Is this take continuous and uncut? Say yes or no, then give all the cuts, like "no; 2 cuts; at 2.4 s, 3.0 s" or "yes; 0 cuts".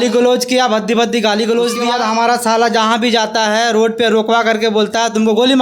no; 1 cut; at 1.8 s